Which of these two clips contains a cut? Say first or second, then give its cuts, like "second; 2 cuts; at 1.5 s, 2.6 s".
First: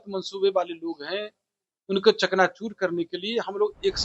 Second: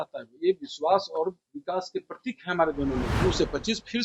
second; 1 cut; at 3.1 s